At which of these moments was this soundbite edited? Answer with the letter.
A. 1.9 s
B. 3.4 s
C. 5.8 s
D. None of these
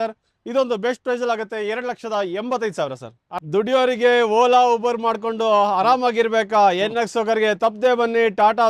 B